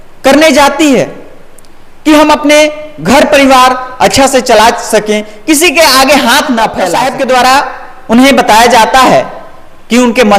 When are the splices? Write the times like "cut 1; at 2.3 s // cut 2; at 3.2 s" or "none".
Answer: cut 1; at 6.8 s